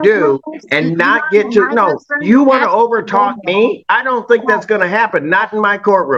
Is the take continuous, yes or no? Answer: yes